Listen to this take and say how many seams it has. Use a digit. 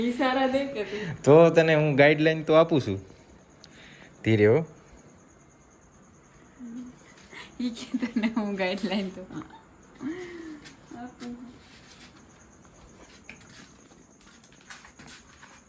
0